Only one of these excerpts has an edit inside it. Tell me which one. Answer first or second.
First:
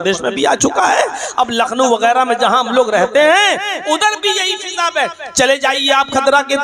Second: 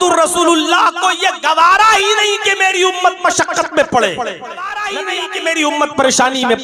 second